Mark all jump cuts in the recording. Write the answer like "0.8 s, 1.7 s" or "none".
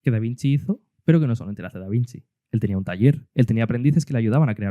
0.9 s, 3.2 s